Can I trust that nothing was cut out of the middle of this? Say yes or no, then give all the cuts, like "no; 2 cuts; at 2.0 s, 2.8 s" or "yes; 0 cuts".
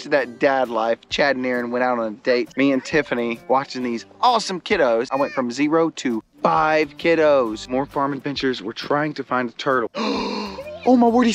no; 5 cuts; at 2.5 s, 3.4 s, 5.1 s, 7.7 s, 10.0 s